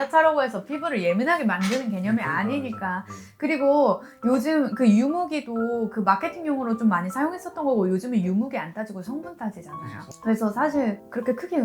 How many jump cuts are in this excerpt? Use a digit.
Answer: 0